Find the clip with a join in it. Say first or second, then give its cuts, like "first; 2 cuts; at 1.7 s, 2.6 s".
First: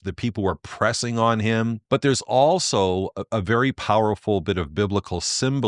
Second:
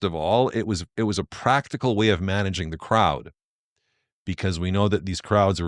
first; 1 cut; at 1.8 s